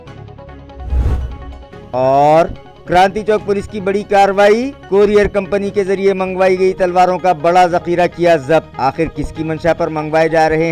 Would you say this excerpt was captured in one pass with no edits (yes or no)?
no